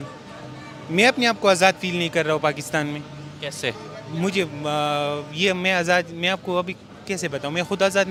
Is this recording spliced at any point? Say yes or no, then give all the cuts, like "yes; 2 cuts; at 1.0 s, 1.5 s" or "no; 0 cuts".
no; 0 cuts